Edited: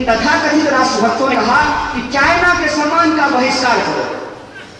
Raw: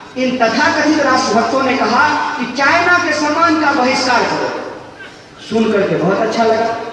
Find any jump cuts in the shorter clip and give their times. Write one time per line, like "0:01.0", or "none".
0:01.3